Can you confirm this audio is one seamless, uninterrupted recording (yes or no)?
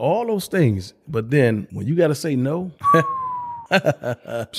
no